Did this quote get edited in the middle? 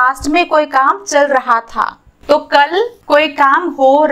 yes; 2 cuts; at 2.1 s, 3.0 s

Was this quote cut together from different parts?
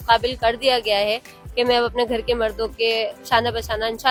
no; 0 cuts

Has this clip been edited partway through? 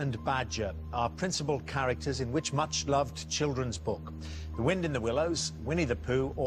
no; 0 cuts

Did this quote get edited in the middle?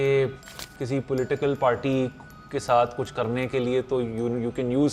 no; 0 cuts

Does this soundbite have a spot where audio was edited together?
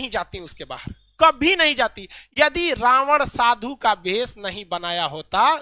no; 0 cuts

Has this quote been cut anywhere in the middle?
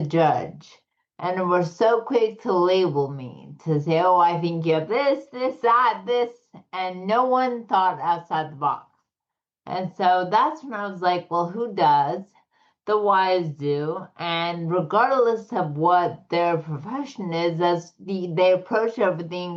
no; 0 cuts

